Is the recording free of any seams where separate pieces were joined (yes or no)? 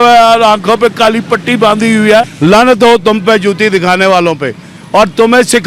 no